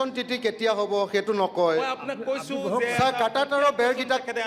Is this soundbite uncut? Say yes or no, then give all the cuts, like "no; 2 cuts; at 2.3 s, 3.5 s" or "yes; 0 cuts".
yes; 0 cuts